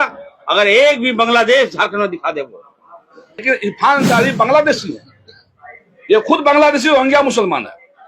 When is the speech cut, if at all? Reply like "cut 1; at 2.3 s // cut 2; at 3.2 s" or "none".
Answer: cut 1; at 3.4 s

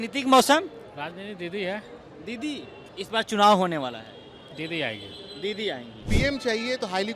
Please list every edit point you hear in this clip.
cut 1; at 2.8 s // cut 2; at 6.0 s

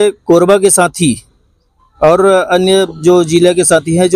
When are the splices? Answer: none

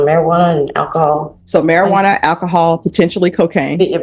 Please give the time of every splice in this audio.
cut 1; at 1.4 s

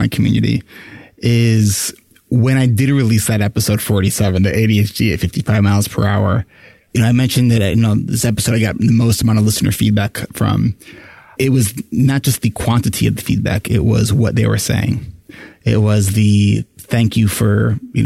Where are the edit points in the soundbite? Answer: cut 1; at 6.6 s // cut 2; at 8.2 s // cut 3; at 10.2 s // cut 4; at 11.4 s

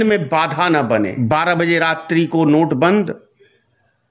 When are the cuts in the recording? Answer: cut 1; at 1.3 s

